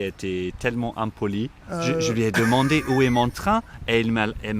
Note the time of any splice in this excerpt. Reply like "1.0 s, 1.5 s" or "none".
1.6 s